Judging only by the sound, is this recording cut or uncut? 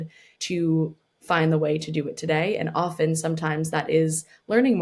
uncut